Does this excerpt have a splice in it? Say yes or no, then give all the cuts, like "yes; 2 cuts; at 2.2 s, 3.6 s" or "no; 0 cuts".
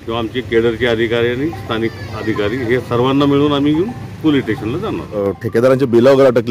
yes; 1 cut; at 5.3 s